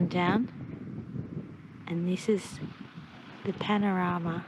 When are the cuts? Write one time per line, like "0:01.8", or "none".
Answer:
none